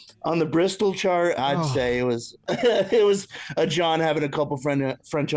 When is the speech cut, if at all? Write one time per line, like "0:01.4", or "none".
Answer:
0:01.4